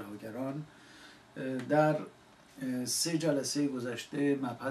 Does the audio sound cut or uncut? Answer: cut